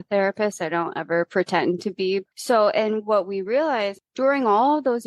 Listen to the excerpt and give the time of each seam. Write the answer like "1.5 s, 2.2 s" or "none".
2.2 s, 4.0 s